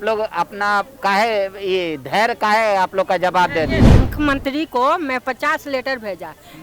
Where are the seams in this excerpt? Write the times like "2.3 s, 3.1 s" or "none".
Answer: 3.9 s